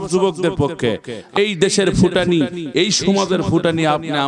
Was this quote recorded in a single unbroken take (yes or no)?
no